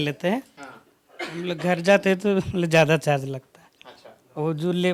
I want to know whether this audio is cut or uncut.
uncut